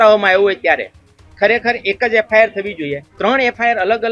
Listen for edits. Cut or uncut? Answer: cut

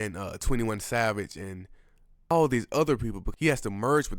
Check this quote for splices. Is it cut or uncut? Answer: cut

